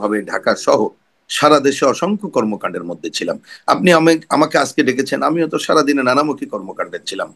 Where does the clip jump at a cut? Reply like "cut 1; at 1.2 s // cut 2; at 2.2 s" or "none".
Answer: none

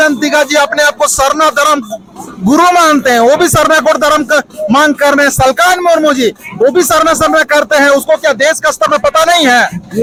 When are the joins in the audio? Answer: none

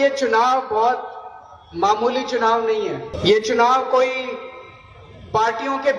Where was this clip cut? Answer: cut 1; at 3.1 s

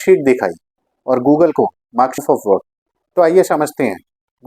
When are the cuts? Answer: cut 1; at 2.2 s

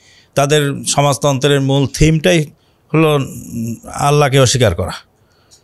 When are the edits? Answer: none

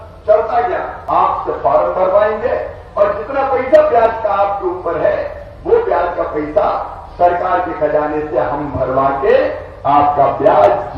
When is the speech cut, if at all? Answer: cut 1; at 0.9 s

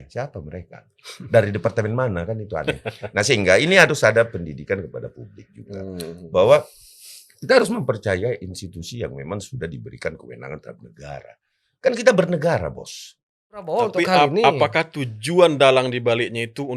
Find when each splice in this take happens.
cut 1; at 13.7 s

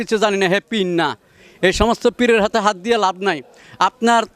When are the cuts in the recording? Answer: none

